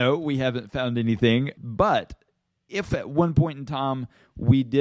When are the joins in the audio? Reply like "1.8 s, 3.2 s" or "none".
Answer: 1.5 s, 2.9 s